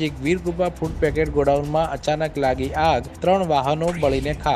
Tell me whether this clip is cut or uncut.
uncut